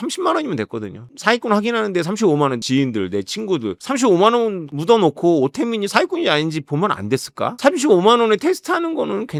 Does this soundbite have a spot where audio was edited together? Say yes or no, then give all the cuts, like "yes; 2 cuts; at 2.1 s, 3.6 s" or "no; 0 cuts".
no; 0 cuts